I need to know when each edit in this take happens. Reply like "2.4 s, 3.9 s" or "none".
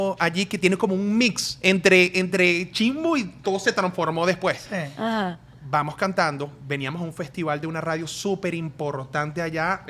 none